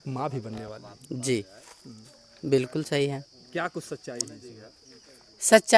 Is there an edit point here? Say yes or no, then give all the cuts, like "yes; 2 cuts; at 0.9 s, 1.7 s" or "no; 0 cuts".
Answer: no; 0 cuts